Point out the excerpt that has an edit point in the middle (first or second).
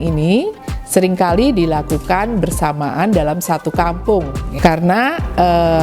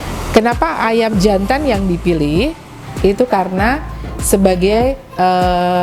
first